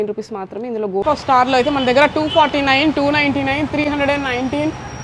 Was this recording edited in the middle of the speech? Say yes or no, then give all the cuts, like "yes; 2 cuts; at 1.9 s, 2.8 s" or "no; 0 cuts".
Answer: yes; 1 cut; at 1.0 s